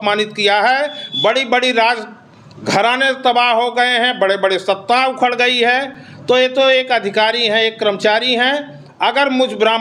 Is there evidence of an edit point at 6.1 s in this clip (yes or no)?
no